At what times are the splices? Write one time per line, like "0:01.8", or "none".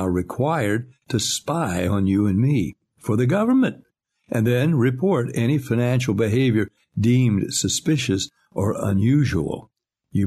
none